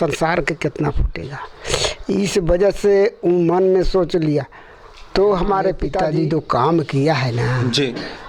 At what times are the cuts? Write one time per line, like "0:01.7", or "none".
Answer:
0:06.0